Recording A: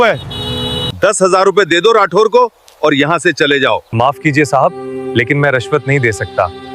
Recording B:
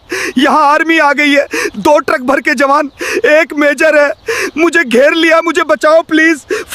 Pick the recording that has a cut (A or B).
A